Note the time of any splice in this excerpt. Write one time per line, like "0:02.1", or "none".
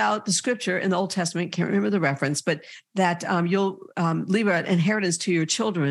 none